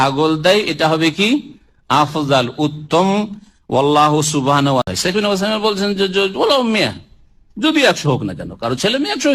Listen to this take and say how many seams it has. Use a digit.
1